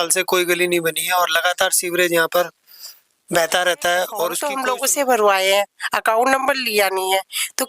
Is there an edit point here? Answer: yes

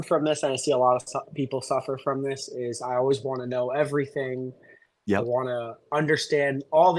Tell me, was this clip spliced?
no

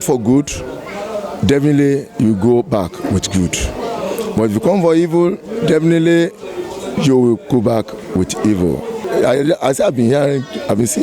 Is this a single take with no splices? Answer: no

